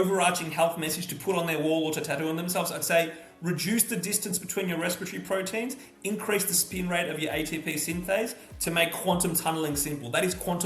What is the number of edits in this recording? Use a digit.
0